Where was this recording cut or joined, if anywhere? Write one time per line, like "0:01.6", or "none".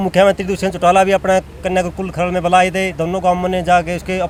none